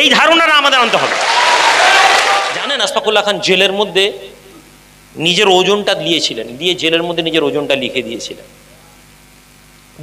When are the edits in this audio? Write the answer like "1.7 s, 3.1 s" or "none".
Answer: 2.5 s